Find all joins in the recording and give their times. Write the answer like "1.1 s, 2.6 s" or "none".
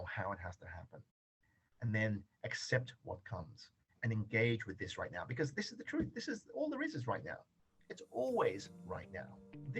none